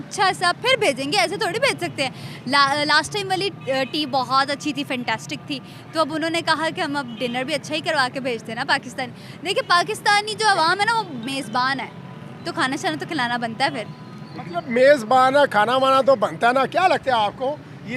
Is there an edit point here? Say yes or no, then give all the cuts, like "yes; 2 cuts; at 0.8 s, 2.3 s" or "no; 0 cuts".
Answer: no; 0 cuts